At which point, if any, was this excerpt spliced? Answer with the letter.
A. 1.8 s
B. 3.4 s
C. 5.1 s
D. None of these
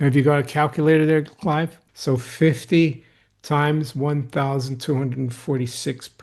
A